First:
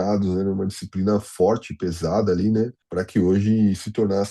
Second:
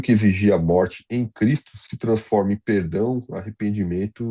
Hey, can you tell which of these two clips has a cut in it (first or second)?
first